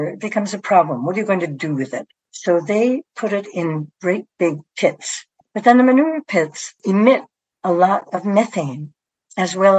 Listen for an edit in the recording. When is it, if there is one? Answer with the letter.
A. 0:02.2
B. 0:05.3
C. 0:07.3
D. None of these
B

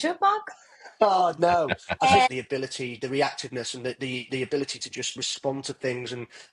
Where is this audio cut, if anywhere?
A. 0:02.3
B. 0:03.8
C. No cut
A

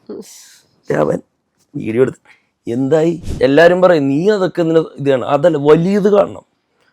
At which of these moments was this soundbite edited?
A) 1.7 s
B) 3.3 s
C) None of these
B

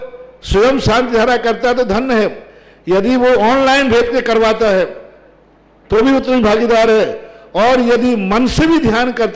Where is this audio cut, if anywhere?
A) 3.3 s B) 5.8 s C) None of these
C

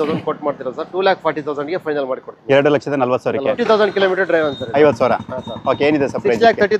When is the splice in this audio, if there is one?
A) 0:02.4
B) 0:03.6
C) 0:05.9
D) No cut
B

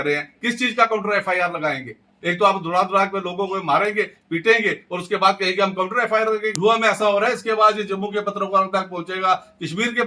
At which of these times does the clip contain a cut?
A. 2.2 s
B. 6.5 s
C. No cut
B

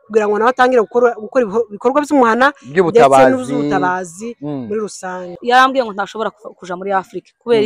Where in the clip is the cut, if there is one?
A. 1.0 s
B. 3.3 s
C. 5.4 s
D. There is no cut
C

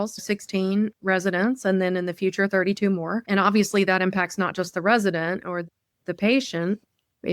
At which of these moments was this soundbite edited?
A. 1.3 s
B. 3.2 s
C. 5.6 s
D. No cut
B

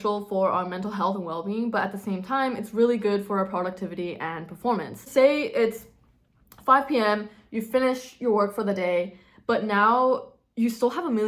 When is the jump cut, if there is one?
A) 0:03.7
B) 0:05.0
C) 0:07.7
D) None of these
B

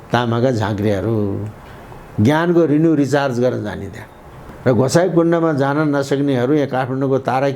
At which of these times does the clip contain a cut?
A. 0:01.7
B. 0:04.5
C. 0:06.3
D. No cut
B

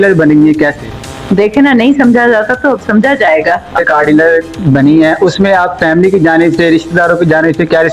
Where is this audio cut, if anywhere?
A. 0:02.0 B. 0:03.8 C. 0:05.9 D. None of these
B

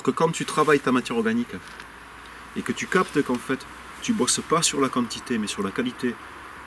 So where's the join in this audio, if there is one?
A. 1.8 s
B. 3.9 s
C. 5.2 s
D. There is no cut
D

